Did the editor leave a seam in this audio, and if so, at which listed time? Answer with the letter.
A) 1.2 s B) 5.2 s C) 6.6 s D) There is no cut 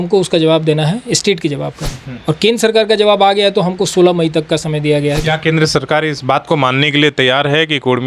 B